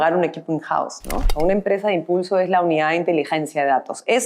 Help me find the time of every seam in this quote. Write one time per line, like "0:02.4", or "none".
0:01.3